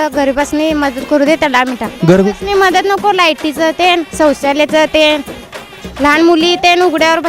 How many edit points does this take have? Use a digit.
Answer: 1